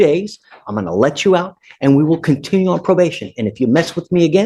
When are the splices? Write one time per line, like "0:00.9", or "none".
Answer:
none

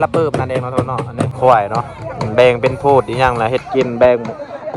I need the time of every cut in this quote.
0:01.3

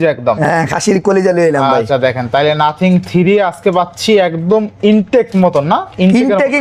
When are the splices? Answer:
none

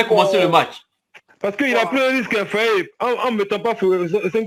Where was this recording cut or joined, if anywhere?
none

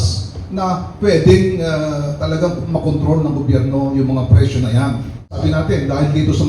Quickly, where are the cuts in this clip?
0:05.4

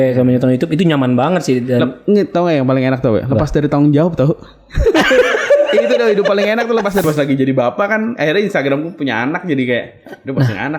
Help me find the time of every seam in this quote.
0:07.0

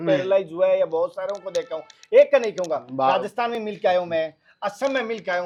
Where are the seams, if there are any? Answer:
none

